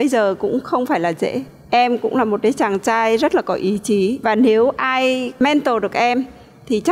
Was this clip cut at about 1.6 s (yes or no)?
no